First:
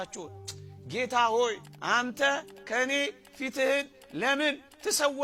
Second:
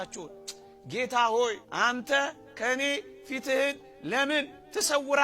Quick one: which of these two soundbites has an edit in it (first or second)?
second